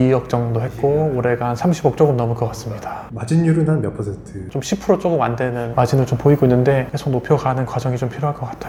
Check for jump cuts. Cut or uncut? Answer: uncut